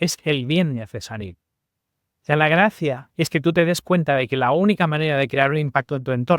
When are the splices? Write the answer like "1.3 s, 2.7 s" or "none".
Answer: none